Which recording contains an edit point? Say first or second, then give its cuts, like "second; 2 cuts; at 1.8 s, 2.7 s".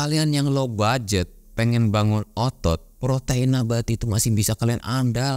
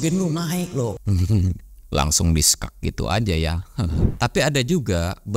second; 1 cut; at 4.1 s